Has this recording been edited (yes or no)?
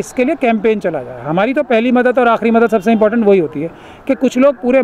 no